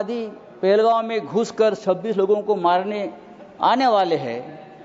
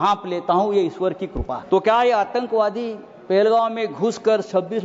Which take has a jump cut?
second; 1 cut; at 1.6 s

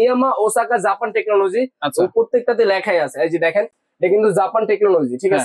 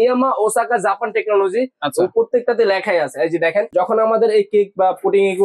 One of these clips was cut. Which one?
second; 1 cut; at 3.7 s

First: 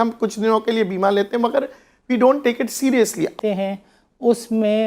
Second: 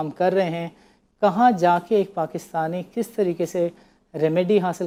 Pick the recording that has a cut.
first; 1 cut; at 3.3 s

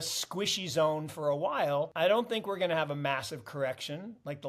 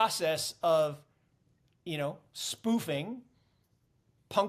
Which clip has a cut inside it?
first; 1 cut; at 1.9 s

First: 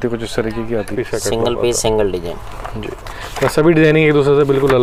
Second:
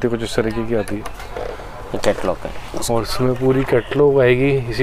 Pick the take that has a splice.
first; 1 cut; at 1.0 s

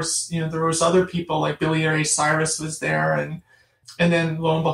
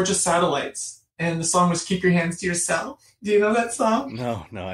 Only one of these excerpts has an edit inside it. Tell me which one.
first; 1 cut; at 3.8 s

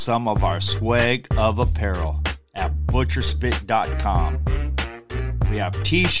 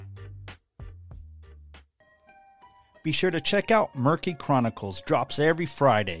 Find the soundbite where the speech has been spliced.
second; 1 cut; at 2.0 s

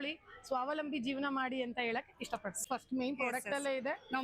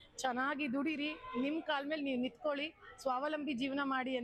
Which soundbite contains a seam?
first; 1 cut; at 2.6 s

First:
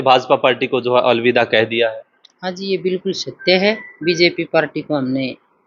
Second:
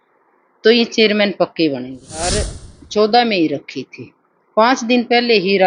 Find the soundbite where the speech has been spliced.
second; 1 cut; at 2.3 s

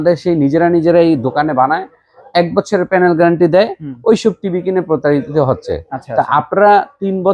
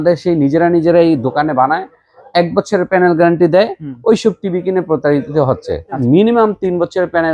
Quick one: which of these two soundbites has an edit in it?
second; 1 cut; at 6.0 s

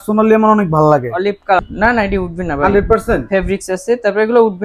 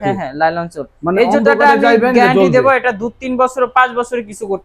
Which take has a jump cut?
first; 1 cut; at 1.6 s

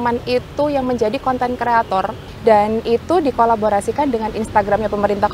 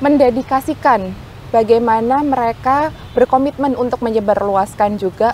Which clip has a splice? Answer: first; 1 cut; at 2.2 s

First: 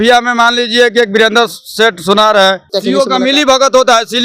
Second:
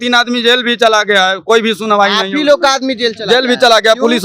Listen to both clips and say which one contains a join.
first; 1 cut; at 2.7 s

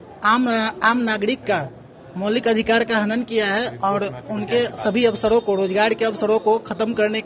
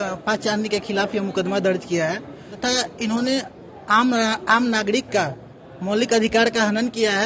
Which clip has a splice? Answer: second; 1 cut; at 2.5 s

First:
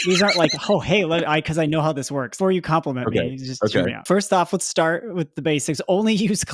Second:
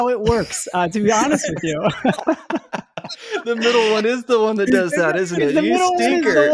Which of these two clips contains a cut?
first; 2 cuts; at 2.3 s, 4.0 s

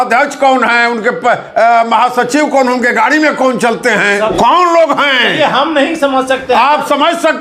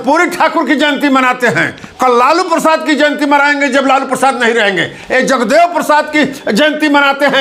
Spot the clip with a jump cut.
first; 1 cut; at 4.3 s

